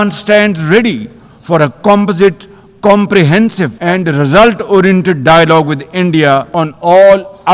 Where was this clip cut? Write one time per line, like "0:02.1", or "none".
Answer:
0:03.7
0:06.5